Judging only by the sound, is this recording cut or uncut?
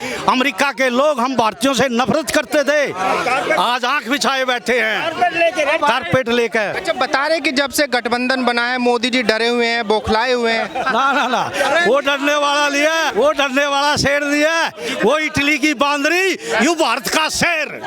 cut